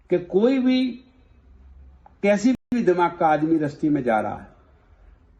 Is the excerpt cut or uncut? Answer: uncut